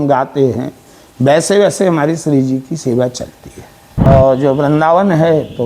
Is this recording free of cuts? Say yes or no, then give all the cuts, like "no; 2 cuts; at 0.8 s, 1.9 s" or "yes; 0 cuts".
no; 1 cut; at 4.1 s